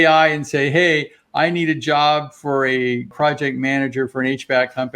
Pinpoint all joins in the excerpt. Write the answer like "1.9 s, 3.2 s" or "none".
3.1 s